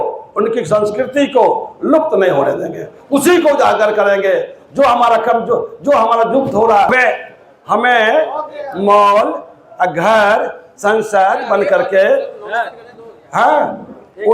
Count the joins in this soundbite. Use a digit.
1